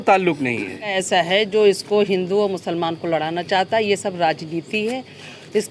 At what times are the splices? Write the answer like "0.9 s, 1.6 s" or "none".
1.0 s